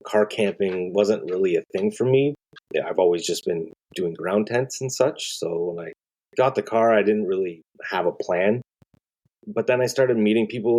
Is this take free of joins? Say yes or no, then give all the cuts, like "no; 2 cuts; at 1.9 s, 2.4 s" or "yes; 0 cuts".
no; 1 cut; at 2.5 s